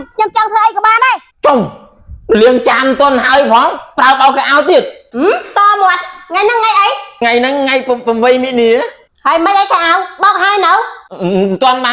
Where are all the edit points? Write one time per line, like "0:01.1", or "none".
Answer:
0:01.3
0:05.0
0:07.2
0:09.0